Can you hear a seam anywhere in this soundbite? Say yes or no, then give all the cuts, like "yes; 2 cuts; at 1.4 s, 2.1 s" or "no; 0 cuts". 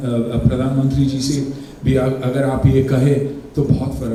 no; 0 cuts